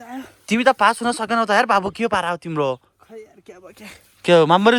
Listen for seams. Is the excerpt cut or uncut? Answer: uncut